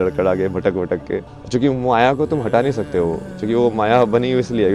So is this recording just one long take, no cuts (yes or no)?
no